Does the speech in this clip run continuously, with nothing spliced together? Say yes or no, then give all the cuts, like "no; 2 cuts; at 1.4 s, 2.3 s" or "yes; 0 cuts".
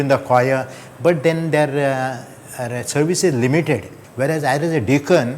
no; 1 cut; at 4.0 s